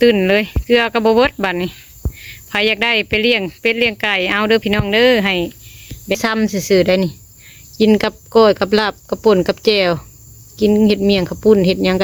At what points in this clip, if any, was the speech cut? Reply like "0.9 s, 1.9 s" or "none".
6.2 s